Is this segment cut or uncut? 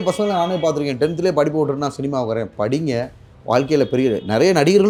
uncut